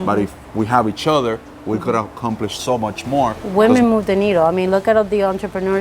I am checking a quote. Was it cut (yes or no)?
yes